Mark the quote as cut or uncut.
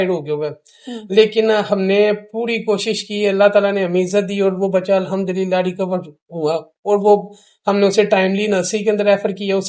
uncut